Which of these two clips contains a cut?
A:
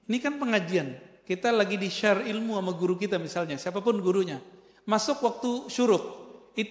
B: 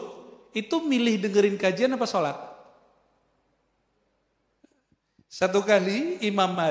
B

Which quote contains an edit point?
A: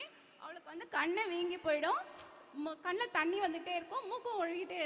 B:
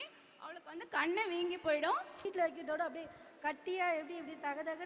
B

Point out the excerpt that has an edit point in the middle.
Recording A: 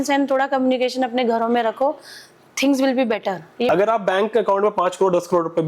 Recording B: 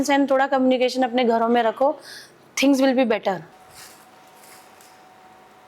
A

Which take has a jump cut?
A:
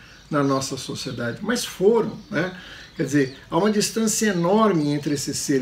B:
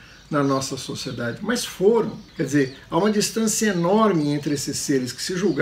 B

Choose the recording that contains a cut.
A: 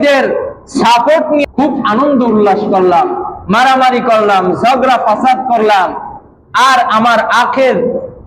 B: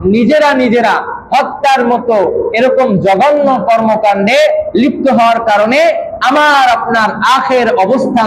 A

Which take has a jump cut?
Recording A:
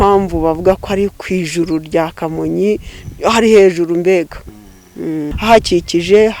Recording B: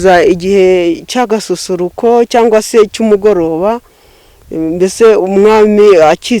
A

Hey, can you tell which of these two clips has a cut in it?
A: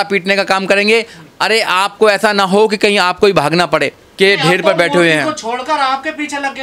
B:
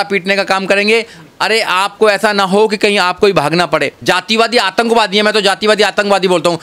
B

